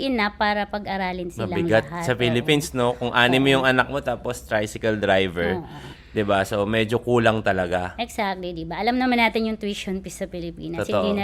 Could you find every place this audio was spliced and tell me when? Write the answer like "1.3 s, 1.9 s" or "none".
none

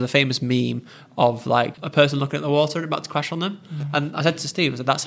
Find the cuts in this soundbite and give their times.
1.8 s

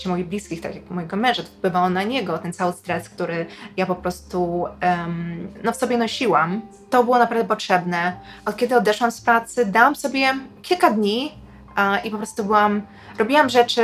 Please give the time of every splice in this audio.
none

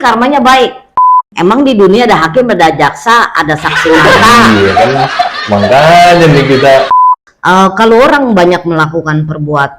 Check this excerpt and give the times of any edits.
1.1 s, 7.0 s

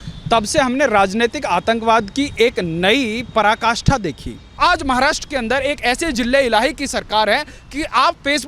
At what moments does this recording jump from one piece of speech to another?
4.6 s

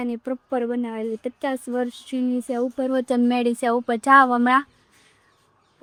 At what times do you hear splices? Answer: none

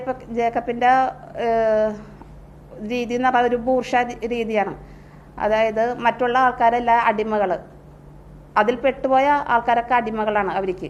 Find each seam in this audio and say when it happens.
none

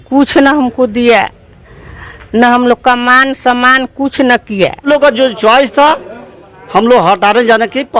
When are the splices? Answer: 4.8 s

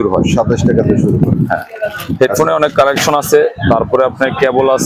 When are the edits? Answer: none

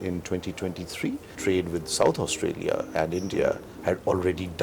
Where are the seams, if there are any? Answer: 1.4 s

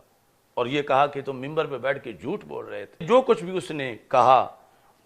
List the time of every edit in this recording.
3.0 s

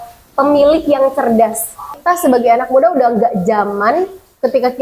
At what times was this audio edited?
1.9 s

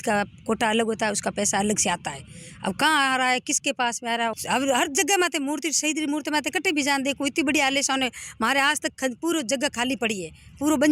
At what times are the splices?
4.3 s

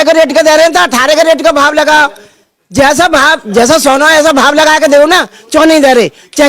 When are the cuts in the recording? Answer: none

